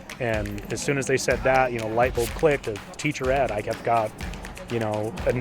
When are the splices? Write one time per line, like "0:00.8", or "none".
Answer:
0:02.9